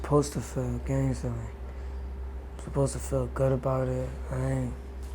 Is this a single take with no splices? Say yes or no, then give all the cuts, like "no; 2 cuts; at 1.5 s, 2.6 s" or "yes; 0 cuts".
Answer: yes; 0 cuts